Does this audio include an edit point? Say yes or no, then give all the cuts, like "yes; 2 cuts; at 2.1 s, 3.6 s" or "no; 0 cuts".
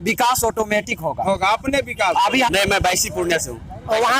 yes; 1 cut; at 2.5 s